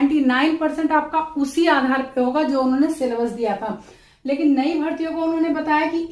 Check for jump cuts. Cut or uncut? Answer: uncut